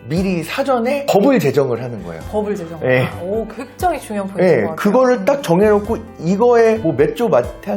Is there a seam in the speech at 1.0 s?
yes; 1 cut; at 1.0 s

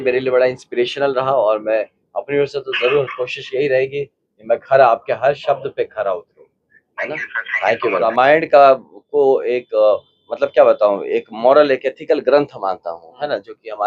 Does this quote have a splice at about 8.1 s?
yes; 1 cut; at 8.1 s

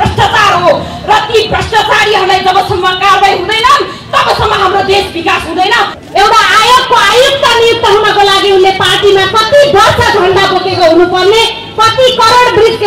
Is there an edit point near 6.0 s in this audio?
yes; 1 cut; at 6.0 s

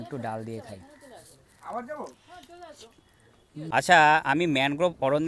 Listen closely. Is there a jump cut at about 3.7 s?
yes; 1 cut; at 3.7 s

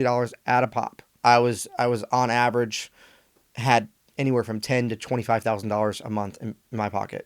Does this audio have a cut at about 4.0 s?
no; 1 cut; at 1.1 s

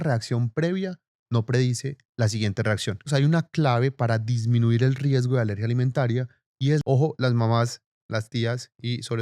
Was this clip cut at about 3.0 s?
yes; 2 cuts; at 3.0 s, 6.8 s

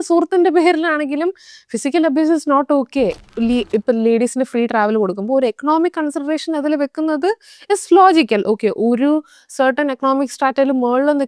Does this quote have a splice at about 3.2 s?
yes; 1 cut; at 3.2 s

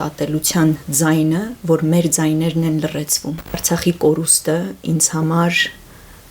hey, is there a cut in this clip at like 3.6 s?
yes; 1 cut; at 3.6 s

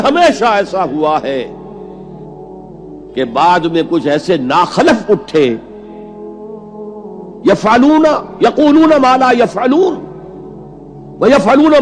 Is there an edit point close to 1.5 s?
yes; 2 cuts; at 1.5 s, 3.0 s

